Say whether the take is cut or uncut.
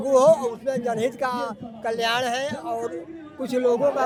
uncut